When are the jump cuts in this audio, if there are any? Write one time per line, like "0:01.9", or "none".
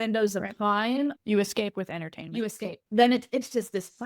0:01.1
0:02.8